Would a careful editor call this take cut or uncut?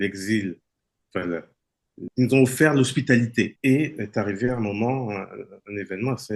cut